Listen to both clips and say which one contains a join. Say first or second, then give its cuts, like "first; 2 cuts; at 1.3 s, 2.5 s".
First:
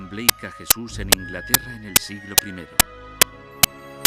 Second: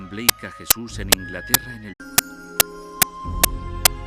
first; 1 cut; at 1.8 s